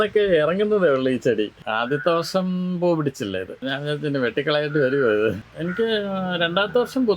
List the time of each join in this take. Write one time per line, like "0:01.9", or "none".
0:01.6
0:03.6
0:05.5